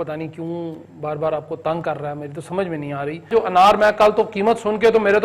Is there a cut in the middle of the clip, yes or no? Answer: yes